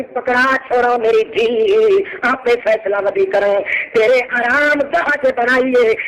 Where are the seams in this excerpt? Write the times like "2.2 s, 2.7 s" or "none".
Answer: none